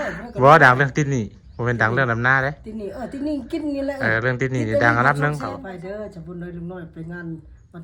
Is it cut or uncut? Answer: cut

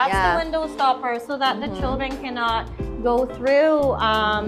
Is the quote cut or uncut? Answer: uncut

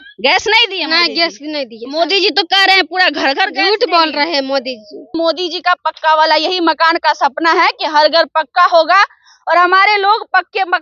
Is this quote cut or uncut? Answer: cut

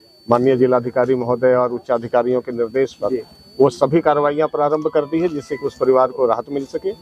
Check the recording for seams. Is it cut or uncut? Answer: uncut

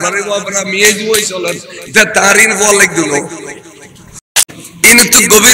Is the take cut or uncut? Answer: cut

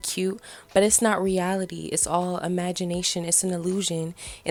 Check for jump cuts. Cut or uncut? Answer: uncut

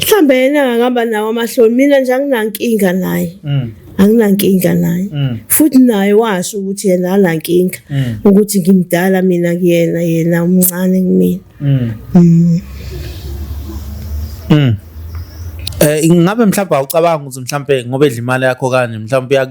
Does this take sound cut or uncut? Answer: uncut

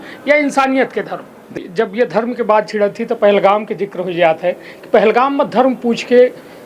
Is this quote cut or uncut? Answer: cut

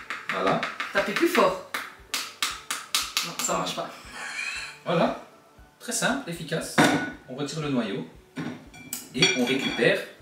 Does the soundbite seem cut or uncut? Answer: uncut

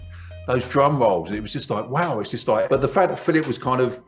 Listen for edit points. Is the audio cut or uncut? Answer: cut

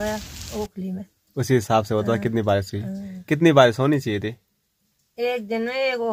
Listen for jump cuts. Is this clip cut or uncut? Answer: uncut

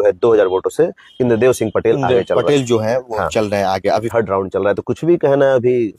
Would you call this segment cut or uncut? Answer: cut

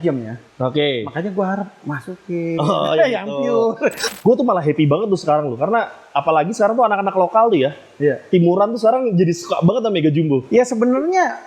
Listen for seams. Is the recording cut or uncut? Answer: cut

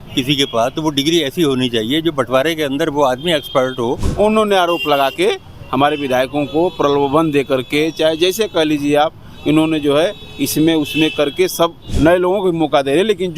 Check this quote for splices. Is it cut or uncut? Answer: cut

